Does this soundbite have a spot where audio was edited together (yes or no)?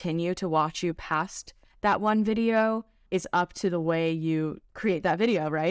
yes